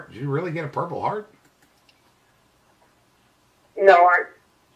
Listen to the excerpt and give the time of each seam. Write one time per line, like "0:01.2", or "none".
none